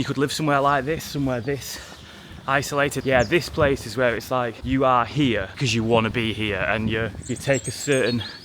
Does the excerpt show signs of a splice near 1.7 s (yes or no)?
no